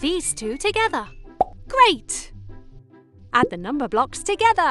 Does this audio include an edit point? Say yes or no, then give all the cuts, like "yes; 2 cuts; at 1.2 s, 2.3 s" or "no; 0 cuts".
no; 0 cuts